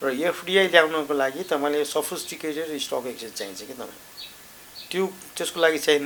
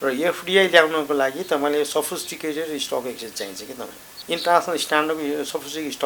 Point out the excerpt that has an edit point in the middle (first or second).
second